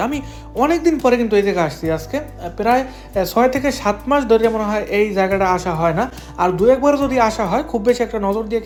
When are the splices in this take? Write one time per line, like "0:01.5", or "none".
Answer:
none